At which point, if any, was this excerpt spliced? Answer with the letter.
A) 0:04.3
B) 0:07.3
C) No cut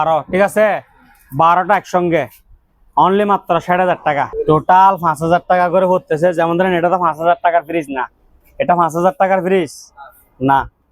A